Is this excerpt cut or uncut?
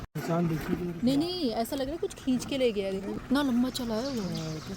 cut